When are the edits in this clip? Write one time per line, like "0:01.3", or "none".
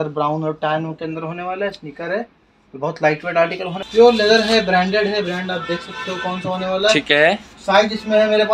0:03.8

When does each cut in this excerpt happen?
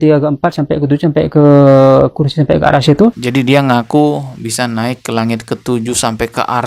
0:03.2

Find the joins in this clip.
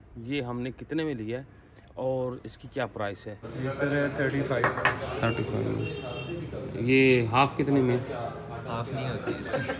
0:03.5

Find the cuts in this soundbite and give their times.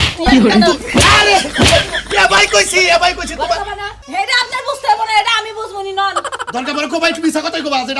0:03.9

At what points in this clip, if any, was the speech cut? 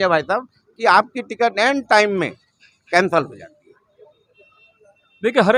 none

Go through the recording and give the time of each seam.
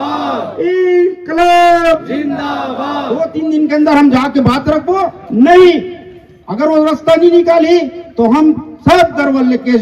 0:03.2

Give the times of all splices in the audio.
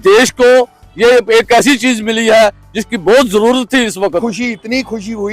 0:04.0

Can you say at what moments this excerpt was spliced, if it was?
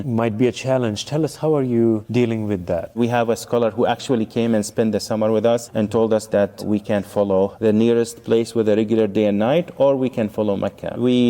0:03.0
0:07.5

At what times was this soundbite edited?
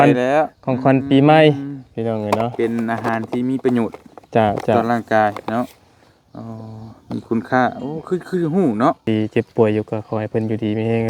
0:09.0

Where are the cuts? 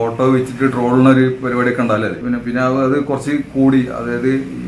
0:02.2

